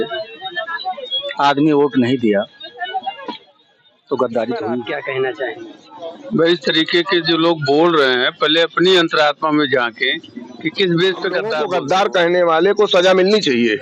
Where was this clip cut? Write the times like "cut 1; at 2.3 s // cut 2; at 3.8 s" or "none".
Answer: cut 1; at 4.8 s // cut 2; at 11.6 s